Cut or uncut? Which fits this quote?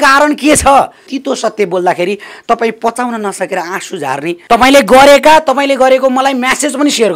cut